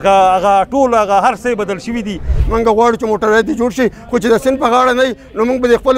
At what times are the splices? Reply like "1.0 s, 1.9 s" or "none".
2.3 s